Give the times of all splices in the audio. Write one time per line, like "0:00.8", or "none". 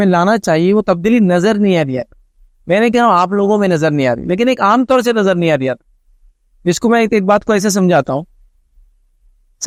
none